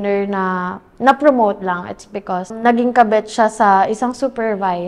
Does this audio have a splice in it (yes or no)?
yes